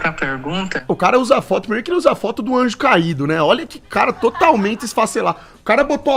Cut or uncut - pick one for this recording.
uncut